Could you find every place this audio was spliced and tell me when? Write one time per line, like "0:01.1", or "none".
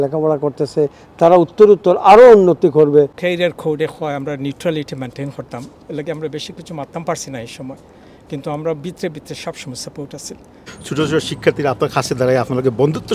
0:03.2
0:10.7